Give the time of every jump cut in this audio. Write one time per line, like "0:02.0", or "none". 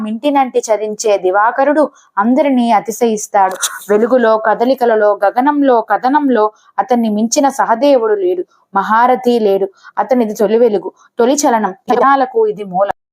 0:11.8